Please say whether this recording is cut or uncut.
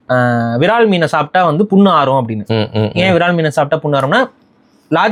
uncut